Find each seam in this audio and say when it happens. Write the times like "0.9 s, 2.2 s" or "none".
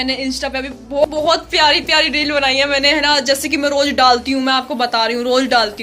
1.1 s